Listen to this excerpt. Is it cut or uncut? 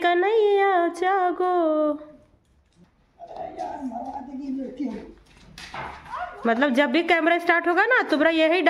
uncut